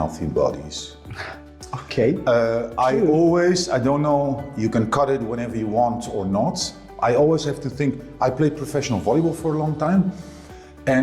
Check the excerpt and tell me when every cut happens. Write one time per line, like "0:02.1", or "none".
none